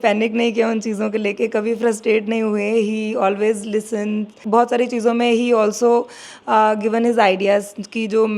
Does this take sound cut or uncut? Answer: cut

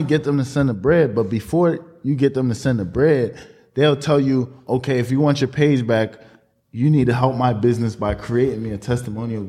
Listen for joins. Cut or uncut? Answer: uncut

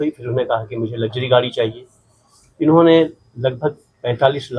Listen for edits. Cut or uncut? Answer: uncut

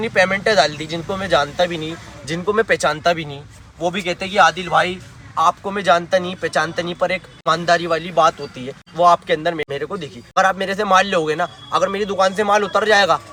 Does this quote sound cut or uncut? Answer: uncut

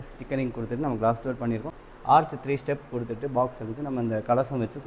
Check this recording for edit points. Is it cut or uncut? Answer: cut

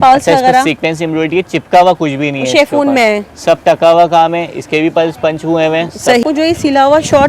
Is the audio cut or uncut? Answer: cut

